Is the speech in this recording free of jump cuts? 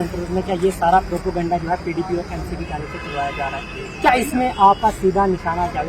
yes; 0 cuts

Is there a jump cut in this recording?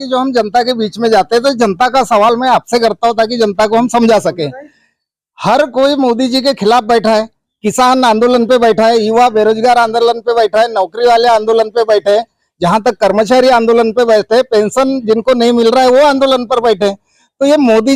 no; 0 cuts

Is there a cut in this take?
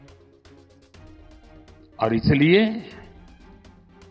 no; 0 cuts

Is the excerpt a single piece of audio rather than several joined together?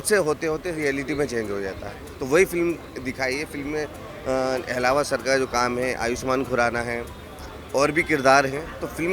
yes; 0 cuts

